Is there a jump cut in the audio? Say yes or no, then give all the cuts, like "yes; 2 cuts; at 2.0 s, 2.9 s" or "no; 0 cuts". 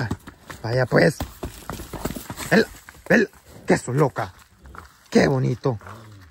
no; 0 cuts